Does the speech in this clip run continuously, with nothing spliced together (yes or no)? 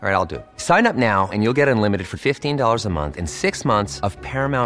yes